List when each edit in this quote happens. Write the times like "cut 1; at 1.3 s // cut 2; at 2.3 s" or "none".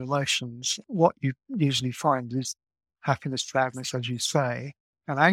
none